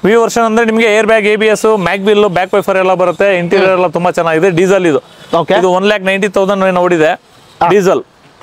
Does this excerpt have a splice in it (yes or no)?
no